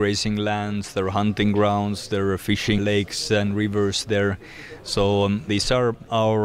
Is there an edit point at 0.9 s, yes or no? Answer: no